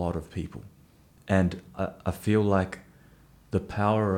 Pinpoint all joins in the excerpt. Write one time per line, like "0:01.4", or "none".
none